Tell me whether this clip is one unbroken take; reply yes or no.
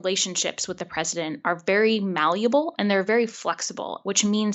yes